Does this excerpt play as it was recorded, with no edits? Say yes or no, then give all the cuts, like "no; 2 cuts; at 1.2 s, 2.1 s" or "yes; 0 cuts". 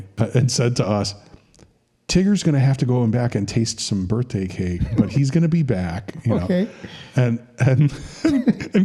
yes; 0 cuts